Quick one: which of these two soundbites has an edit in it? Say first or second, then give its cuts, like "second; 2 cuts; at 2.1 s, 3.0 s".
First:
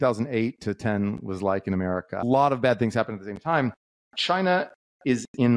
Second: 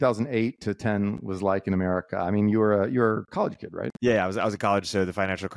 first; 1 cut; at 2.2 s